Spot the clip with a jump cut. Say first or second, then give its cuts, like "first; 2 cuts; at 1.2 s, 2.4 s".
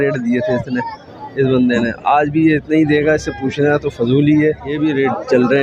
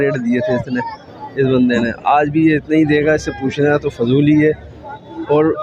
first; 1 cut; at 4.7 s